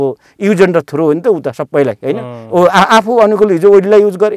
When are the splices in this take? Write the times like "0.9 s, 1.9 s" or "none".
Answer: none